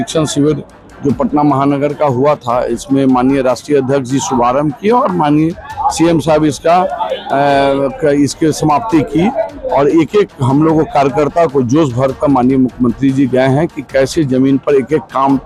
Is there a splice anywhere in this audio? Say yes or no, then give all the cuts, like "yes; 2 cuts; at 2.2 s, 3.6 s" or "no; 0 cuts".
no; 0 cuts